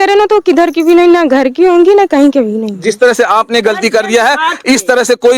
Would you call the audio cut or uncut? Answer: uncut